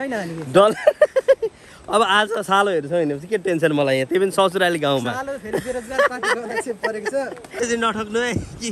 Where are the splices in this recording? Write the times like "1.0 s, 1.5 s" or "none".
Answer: 7.6 s